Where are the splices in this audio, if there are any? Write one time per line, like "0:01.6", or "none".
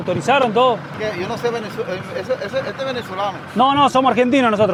none